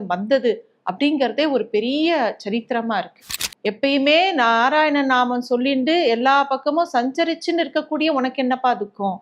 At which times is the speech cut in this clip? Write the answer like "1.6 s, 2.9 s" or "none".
3.2 s